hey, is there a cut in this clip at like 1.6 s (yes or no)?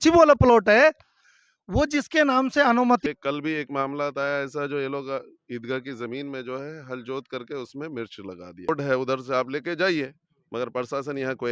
no